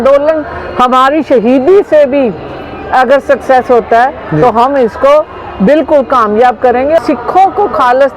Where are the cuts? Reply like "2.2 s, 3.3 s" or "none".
7.0 s